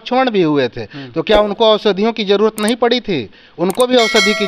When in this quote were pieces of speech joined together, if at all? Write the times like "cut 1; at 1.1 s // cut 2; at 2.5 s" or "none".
none